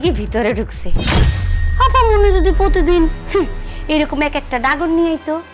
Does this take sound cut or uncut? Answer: uncut